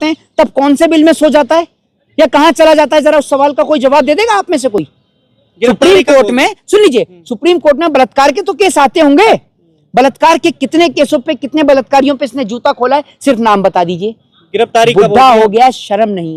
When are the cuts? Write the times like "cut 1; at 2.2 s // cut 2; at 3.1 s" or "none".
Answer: none